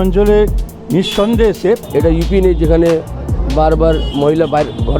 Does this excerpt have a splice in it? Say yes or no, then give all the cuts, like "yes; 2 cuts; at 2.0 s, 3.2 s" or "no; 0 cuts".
yes; 1 cut; at 1.8 s